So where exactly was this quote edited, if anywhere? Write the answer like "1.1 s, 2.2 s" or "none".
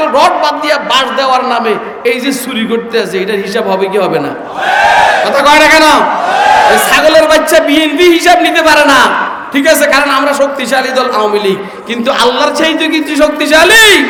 none